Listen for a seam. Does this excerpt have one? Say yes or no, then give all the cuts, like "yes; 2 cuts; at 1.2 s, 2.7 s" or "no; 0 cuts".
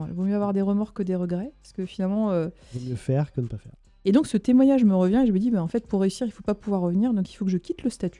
yes; 1 cut; at 3.9 s